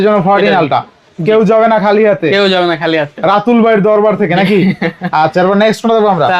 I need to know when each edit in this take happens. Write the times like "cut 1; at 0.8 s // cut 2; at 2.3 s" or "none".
none